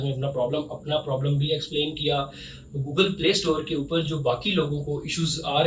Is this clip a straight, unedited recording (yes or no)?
yes